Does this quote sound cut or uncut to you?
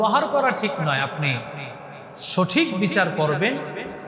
uncut